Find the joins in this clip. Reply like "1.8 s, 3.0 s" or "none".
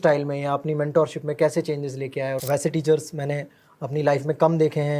2.4 s